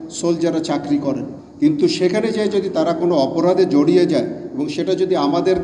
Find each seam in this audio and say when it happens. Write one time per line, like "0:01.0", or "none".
0:01.4